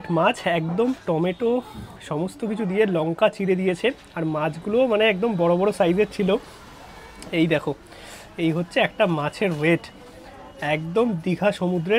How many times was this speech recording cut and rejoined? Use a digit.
0